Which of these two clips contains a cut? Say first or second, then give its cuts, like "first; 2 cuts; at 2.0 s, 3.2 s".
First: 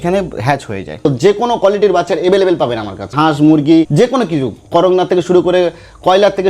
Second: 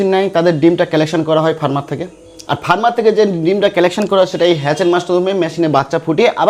first; 3 cuts; at 1.1 s, 3.1 s, 3.9 s